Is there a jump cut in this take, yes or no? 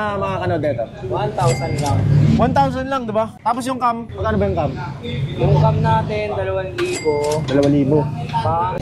no